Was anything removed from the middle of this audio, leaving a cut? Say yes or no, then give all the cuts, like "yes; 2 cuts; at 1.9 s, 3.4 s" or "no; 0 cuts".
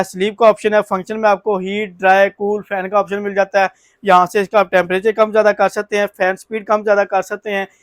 no; 0 cuts